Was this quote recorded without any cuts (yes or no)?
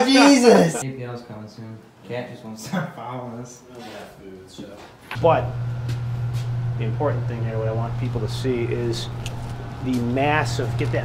no